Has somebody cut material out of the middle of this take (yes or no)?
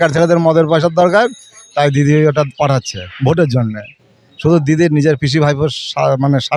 no